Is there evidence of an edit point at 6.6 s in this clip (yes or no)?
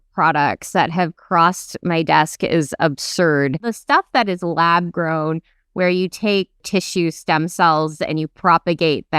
yes